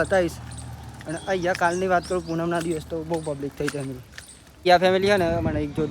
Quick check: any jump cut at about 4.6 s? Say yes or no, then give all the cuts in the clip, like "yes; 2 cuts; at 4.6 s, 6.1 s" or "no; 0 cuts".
yes; 1 cut; at 4.6 s